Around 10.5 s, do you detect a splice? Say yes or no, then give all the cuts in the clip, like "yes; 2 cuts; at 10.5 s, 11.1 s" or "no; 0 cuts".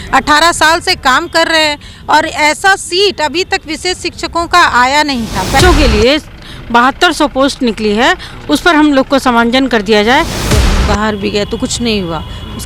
yes; 2 cuts; at 5.6 s, 10.5 s